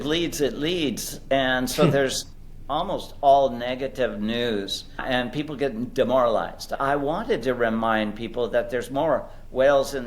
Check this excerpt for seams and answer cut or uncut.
cut